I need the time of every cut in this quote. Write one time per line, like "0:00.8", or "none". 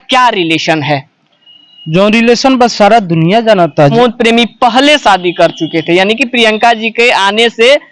0:03.9